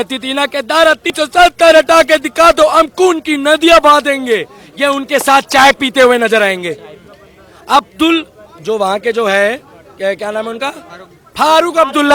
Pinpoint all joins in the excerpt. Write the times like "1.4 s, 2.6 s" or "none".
1.1 s